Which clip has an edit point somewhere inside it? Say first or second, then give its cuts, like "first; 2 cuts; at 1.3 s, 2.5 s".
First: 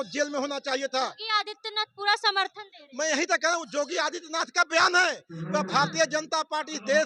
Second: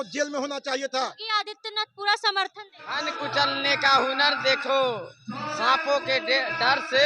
second; 1 cut; at 3.0 s